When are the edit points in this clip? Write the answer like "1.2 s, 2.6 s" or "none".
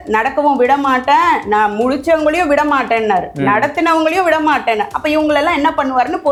none

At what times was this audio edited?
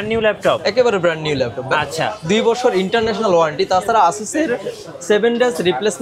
none

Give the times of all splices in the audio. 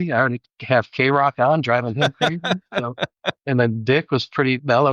3.3 s

